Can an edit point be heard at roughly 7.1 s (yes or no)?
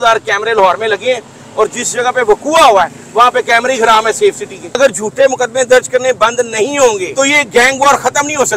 yes